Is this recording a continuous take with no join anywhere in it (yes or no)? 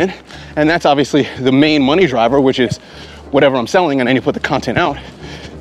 yes